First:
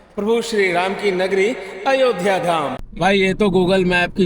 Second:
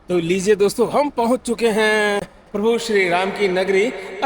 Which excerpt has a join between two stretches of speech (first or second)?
first